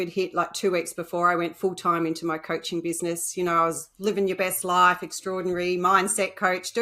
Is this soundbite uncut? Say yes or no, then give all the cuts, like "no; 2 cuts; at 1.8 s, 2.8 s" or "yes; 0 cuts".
yes; 0 cuts